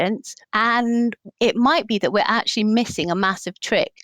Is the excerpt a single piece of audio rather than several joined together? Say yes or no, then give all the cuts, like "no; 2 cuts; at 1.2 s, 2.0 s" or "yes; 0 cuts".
no; 1 cut; at 1.2 s